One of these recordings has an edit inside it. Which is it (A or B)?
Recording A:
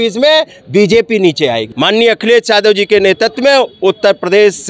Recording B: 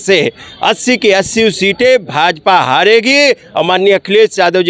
A